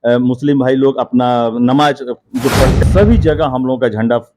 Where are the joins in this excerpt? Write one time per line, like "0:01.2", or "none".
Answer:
0:02.8